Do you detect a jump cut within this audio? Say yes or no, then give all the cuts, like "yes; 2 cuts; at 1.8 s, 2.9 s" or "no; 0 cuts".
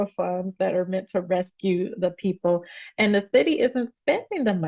no; 0 cuts